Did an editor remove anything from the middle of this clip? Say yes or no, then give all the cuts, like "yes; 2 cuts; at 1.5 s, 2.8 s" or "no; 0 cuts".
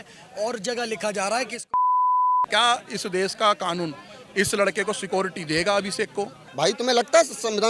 yes; 2 cuts; at 2.5 s, 6.4 s